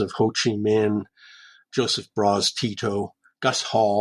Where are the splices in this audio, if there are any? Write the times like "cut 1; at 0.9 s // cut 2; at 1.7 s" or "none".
none